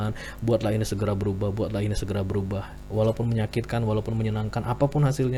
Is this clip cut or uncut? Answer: uncut